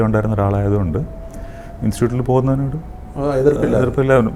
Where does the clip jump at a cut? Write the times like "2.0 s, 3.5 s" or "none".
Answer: none